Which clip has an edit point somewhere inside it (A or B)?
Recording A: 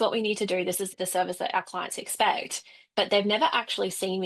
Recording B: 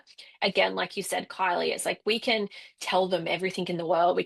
A